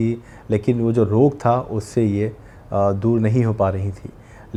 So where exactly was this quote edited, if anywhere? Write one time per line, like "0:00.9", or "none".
none